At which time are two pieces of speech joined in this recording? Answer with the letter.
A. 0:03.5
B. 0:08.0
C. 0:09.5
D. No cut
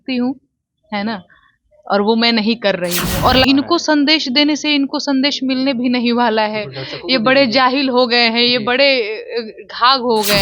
A